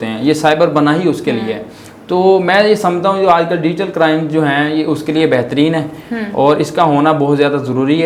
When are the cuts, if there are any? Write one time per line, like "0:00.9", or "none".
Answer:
none